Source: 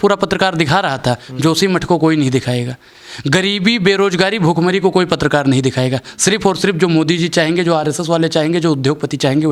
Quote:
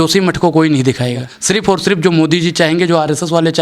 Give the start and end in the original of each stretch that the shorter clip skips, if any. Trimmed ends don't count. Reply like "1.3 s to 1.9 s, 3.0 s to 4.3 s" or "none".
2.8 s to 6.1 s